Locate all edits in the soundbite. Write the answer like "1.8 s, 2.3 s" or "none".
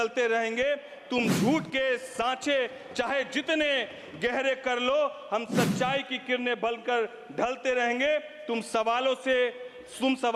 none